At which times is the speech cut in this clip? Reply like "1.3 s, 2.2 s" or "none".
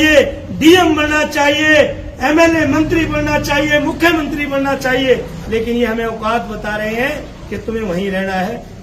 none